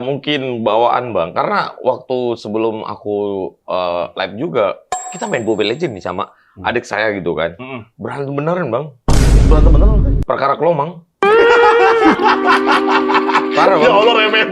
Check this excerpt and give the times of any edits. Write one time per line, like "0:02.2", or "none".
none